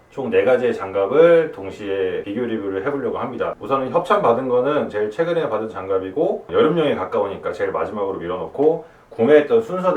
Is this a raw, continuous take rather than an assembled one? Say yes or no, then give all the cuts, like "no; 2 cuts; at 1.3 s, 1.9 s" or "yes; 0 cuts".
yes; 0 cuts